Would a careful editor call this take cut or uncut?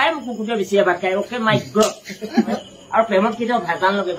cut